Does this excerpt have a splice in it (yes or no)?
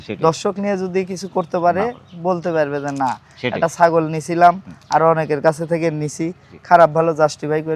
no